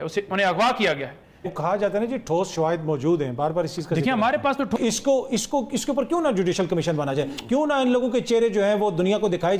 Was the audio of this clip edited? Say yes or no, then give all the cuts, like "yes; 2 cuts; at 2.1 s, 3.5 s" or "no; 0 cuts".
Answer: yes; 2 cuts; at 1.5 s, 4.8 s